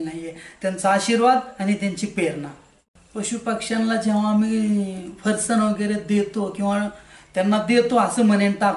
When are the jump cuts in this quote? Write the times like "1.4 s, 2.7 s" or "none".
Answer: 2.8 s